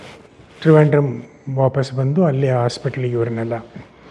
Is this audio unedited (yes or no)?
yes